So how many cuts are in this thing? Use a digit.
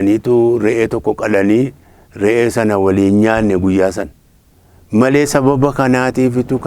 0